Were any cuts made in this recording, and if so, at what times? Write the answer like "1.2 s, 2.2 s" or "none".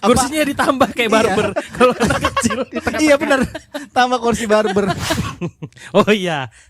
5.1 s